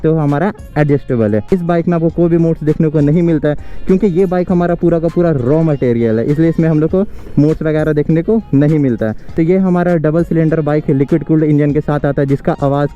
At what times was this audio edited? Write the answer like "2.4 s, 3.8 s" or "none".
1.5 s, 9.3 s